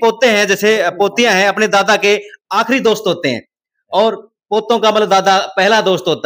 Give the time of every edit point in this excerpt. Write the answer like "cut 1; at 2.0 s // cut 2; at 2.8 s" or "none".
none